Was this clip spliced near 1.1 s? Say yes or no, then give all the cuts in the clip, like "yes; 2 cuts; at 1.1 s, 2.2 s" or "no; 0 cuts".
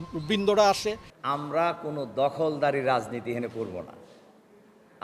yes; 1 cut; at 1.1 s